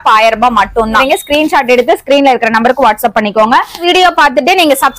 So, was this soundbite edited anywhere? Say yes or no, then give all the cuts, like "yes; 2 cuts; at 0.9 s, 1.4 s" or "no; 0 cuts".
yes; 2 cuts; at 1.0 s, 3.8 s